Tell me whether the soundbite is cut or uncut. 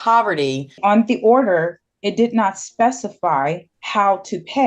cut